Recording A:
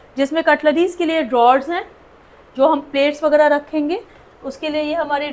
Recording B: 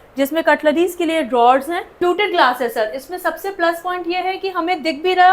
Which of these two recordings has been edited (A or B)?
B